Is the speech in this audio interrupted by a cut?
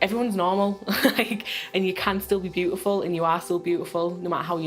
no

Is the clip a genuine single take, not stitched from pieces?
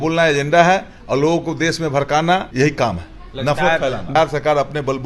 no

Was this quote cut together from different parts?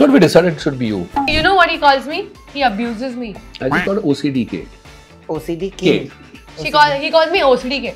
yes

